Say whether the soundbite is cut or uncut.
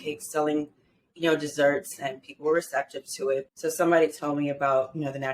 cut